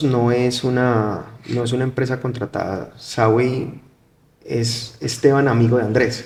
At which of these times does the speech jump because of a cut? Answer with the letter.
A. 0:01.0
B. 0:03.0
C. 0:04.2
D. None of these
D